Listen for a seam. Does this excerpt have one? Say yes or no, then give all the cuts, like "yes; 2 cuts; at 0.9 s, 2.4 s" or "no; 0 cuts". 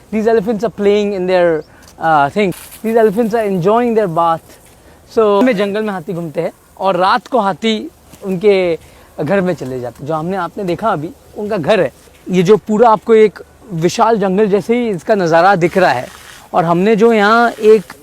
yes; 1 cut; at 5.4 s